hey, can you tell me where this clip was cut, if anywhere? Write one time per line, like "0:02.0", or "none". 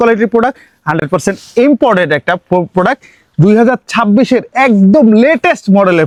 none

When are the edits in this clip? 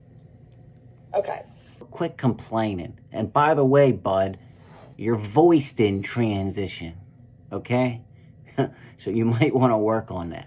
0:01.9

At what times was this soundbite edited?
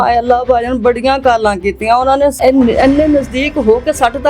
0:02.4

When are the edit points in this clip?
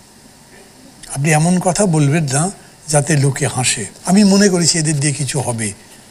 0:03.9

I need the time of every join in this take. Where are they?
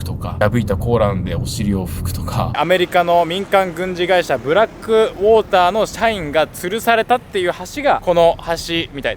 0:02.5

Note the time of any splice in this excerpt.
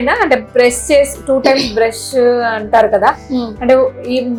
none

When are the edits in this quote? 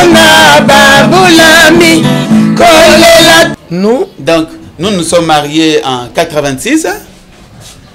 0:03.5

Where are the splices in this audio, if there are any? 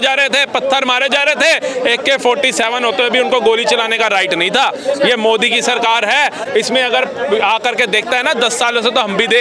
none

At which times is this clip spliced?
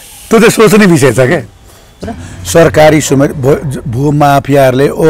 0:01.9

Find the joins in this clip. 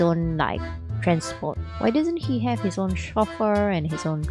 0:01.7

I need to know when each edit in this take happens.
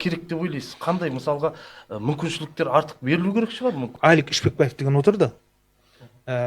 0:03.9

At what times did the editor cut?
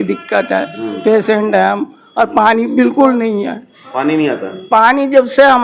none

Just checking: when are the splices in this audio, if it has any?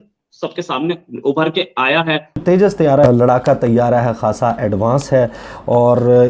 0:02.3
0:03.1

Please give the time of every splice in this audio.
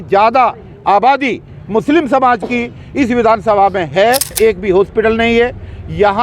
0:04.3

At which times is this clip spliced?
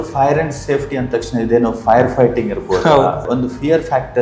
0:03.2

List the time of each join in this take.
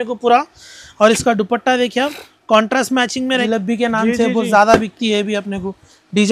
0:03.2

